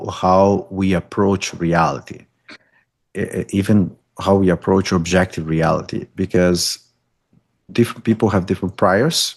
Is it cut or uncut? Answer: uncut